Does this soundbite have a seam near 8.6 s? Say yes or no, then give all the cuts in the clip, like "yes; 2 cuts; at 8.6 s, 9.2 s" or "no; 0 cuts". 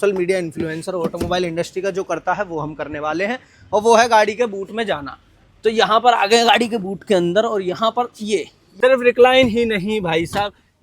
yes; 1 cut; at 8.6 s